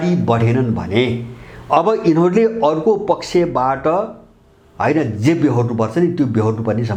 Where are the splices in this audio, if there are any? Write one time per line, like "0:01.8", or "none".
none